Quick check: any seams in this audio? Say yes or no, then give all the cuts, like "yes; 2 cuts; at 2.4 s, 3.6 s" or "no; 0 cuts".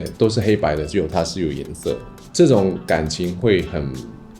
no; 0 cuts